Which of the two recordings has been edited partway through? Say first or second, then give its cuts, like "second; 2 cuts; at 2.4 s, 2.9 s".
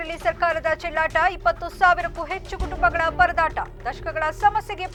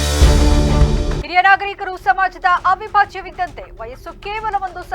second; 1 cut; at 1.1 s